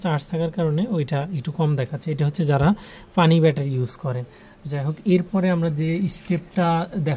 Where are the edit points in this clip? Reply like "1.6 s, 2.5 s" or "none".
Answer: none